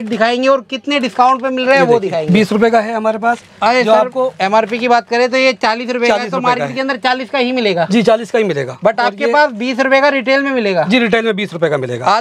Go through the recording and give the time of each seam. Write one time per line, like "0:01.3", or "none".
0:02.3